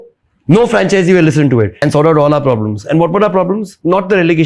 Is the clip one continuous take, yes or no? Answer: no